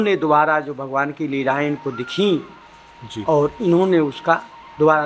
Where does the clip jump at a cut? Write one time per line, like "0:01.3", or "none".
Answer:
none